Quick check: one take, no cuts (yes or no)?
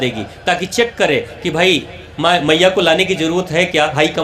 yes